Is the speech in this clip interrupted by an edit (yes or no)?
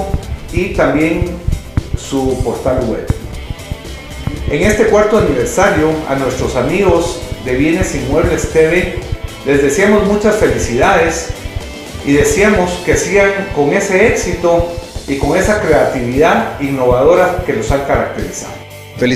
no